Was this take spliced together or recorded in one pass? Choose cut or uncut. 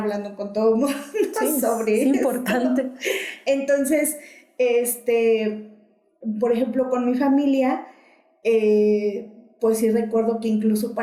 uncut